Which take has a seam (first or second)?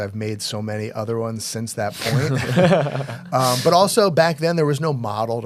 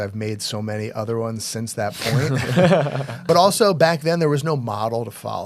second